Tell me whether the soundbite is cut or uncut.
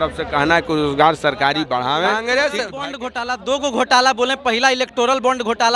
cut